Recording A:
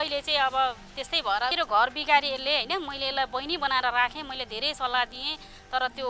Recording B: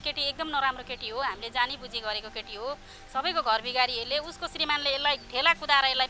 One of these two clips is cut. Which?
A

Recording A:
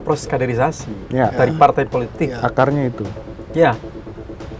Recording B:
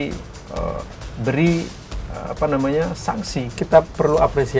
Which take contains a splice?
B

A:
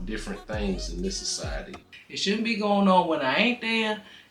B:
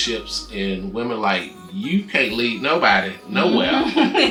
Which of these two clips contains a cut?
A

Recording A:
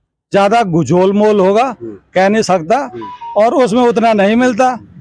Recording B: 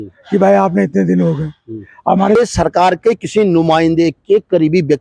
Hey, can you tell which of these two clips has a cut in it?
B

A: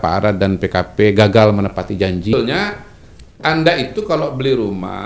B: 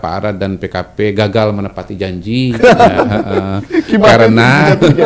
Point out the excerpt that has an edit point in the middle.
A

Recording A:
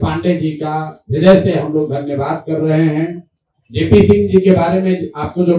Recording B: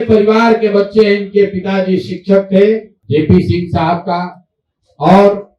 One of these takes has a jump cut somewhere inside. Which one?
B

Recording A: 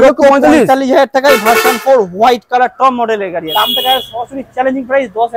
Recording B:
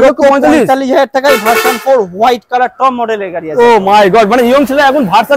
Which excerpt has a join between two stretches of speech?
A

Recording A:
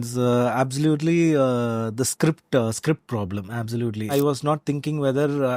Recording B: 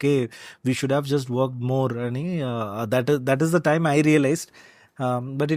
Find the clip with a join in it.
A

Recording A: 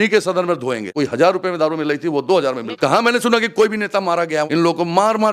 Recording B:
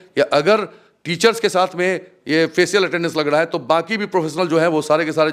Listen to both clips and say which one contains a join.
A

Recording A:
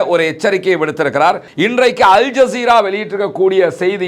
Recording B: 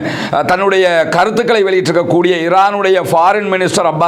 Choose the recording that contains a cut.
A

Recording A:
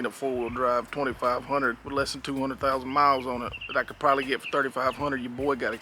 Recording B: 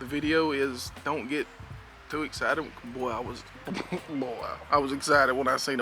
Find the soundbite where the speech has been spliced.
B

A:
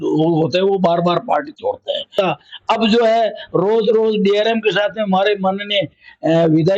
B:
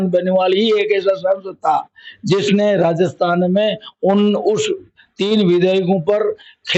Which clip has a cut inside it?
A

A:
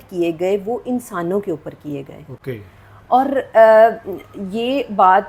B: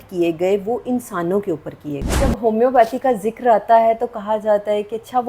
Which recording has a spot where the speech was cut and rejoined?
B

